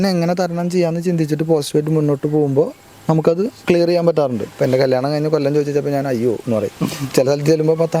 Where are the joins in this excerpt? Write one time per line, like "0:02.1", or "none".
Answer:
0:04.4